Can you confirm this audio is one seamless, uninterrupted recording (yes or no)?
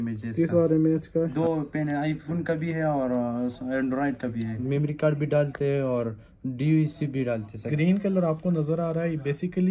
no